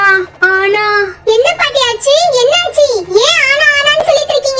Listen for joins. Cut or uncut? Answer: uncut